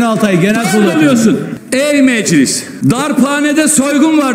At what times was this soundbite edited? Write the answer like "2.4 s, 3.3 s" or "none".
1.6 s, 2.6 s